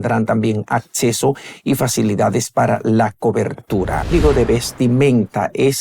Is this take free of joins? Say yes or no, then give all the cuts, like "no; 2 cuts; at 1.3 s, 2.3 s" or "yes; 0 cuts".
no; 1 cut; at 4.1 s